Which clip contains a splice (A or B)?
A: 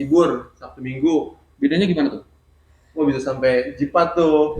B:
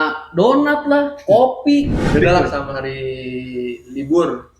B